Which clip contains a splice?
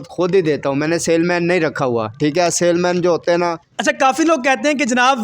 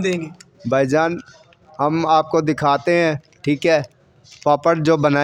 first; 1 cut; at 3.7 s

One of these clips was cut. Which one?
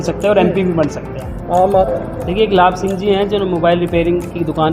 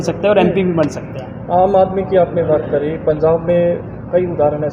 first; 1 cut; at 1.9 s

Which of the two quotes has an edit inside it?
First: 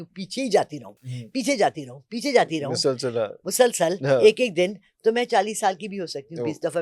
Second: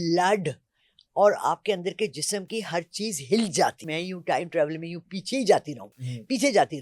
second; 1 cut; at 3.9 s

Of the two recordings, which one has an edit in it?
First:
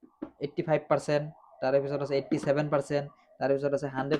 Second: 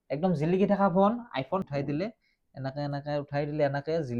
second; 1 cut; at 1.7 s

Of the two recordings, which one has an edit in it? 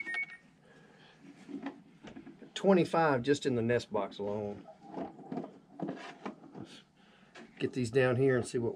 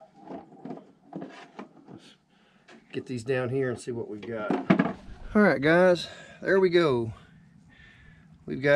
second; 1 cut; at 5.1 s

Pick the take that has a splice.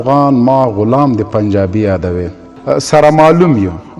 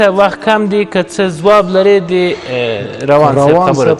first; 1 cut; at 2.6 s

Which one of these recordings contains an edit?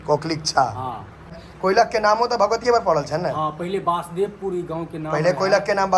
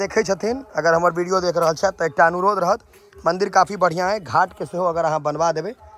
first; 1 cut; at 1.4 s

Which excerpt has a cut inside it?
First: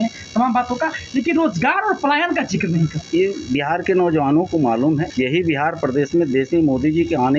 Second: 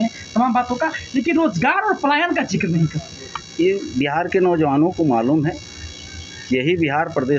first; 2 cuts; at 3.0 s, 5.1 s

